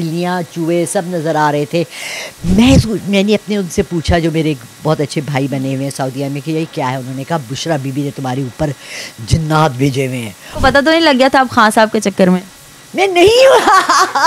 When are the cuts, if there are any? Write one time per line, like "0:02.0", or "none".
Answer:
0:10.4

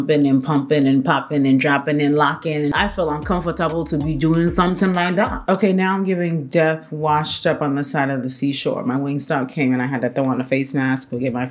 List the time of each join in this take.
0:02.7
0:05.5

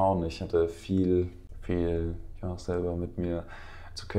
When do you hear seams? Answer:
0:01.5

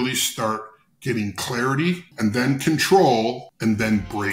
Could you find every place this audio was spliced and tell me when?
0:02.1
0:03.5

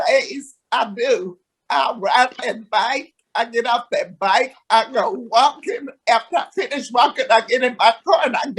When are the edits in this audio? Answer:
none

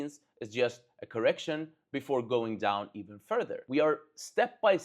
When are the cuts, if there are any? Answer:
0:03.6

